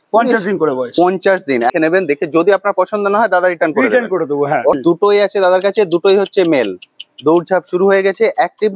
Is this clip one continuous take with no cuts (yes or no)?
no